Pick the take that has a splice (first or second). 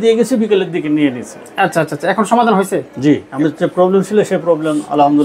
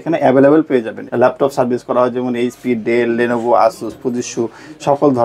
second